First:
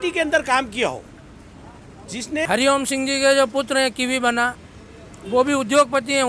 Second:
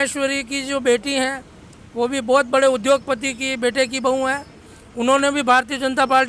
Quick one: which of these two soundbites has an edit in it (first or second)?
first